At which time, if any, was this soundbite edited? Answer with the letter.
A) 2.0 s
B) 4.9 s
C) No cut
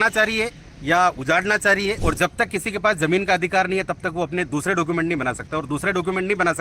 A